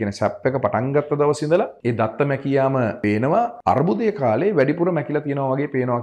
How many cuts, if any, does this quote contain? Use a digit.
2